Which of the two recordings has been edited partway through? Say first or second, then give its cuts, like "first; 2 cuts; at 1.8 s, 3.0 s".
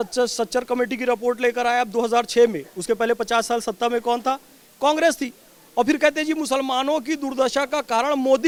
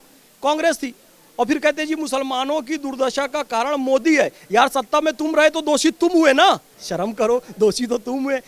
second; 1 cut; at 6.7 s